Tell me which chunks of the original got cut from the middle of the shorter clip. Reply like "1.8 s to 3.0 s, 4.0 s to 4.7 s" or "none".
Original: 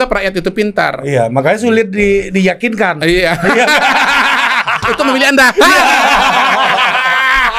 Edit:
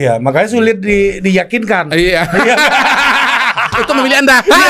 none